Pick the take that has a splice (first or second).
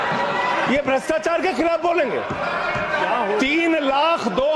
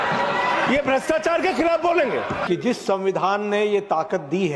second